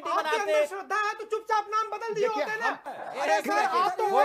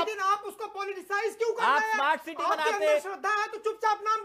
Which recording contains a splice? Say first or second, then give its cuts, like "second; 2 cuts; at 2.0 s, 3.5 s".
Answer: first; 1 cut; at 2.8 s